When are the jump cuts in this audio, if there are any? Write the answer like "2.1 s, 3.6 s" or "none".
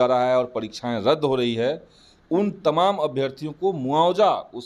none